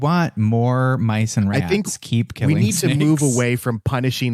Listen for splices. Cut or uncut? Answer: uncut